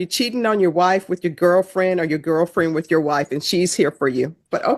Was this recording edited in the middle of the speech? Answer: no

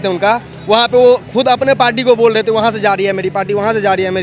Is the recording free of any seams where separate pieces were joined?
yes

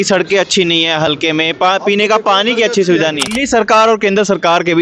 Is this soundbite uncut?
no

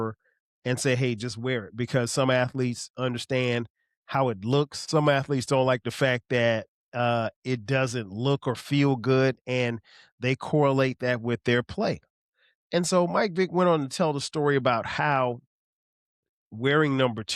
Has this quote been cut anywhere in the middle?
no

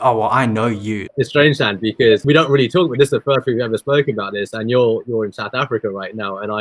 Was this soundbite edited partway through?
yes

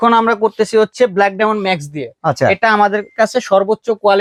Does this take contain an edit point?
no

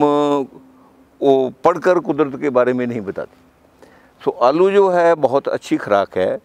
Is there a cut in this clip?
no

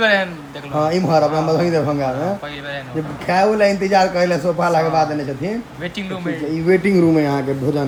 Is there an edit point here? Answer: no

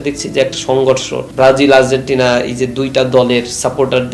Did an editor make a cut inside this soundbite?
yes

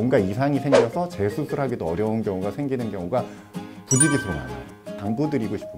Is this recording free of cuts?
yes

